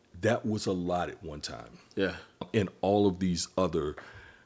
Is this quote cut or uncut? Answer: cut